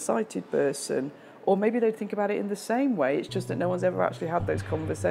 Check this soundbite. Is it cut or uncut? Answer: uncut